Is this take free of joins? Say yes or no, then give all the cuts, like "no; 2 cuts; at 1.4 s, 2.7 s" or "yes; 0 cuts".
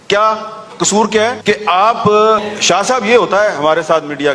no; 1 cut; at 2.4 s